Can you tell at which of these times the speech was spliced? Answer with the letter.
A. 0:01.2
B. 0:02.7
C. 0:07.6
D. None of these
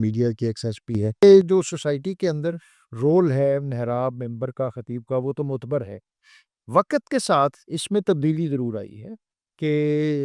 A